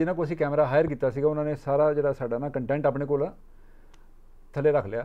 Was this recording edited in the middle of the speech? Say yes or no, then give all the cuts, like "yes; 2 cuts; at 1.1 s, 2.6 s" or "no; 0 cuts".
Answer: no; 0 cuts